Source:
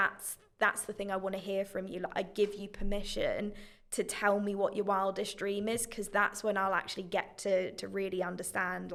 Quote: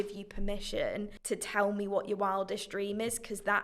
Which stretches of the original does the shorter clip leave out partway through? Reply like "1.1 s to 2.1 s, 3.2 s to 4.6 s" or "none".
3.6 s to 3.8 s

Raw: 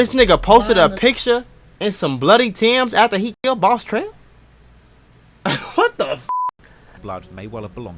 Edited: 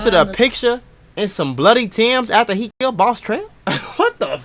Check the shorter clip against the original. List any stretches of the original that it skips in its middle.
4.2 s to 5.3 s

